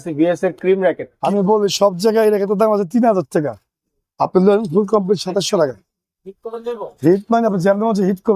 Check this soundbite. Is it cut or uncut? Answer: cut